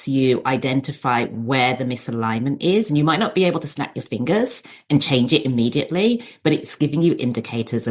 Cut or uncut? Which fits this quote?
cut